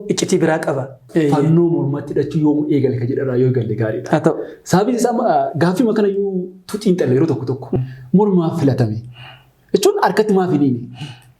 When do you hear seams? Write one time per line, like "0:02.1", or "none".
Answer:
0:01.0
0:07.7